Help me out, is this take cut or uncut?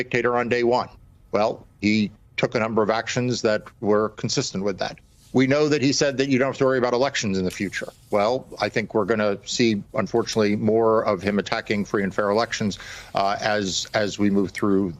uncut